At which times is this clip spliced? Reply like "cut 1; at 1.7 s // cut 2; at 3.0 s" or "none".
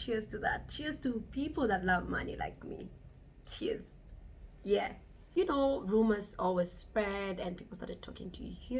cut 1; at 5.5 s